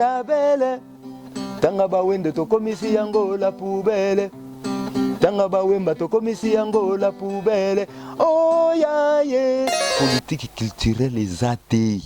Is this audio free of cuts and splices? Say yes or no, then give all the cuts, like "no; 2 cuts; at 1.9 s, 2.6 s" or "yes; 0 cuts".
no; 1 cut; at 9.9 s